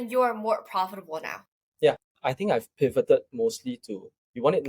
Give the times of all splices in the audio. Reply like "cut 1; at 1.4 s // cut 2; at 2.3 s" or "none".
cut 1; at 2.0 s